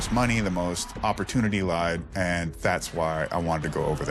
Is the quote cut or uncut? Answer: uncut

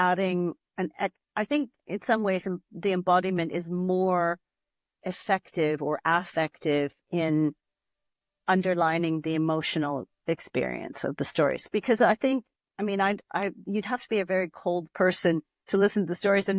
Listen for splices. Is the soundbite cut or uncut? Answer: cut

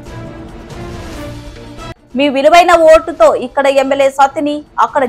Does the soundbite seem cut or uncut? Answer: cut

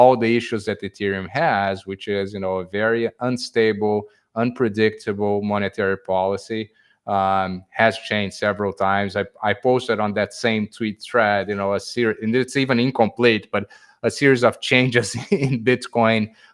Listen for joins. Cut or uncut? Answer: uncut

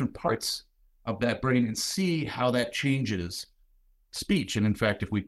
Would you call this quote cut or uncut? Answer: uncut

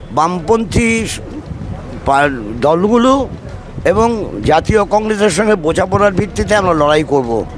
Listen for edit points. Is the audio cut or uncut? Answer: uncut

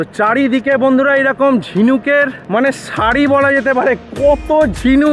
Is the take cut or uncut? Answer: cut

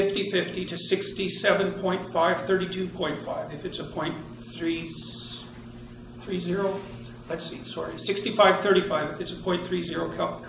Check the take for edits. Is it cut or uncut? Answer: cut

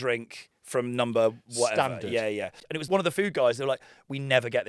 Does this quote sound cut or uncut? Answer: cut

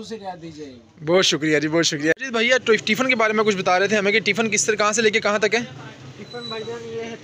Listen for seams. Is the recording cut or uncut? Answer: cut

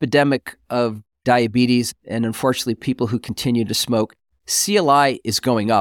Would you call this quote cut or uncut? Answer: cut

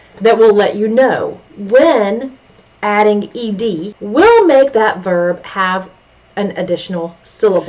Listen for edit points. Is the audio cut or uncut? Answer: cut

